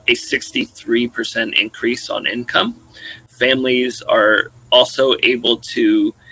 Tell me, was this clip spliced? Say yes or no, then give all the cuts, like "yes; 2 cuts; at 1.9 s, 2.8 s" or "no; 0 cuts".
yes; 1 cut; at 3.3 s